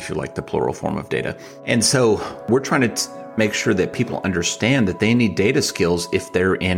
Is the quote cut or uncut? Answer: cut